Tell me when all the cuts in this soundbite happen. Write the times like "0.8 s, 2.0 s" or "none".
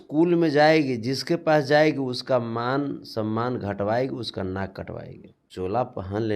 5.4 s